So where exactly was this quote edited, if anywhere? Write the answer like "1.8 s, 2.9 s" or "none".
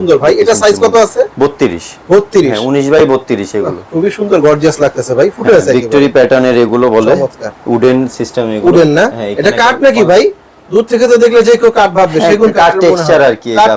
none